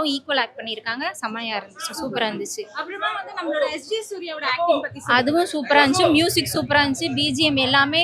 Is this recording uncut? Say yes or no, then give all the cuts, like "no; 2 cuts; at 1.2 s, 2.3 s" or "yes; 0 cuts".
yes; 0 cuts